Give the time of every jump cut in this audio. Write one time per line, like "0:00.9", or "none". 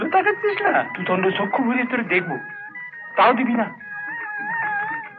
0:00.9